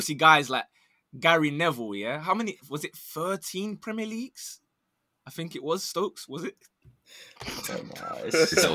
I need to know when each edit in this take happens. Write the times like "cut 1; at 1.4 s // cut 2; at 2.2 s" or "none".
none